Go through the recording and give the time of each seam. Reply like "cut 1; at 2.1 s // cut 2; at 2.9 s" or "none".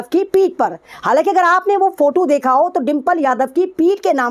none